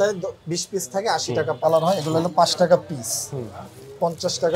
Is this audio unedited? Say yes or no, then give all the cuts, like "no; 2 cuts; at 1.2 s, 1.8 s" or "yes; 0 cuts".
no; 1 cut; at 1.6 s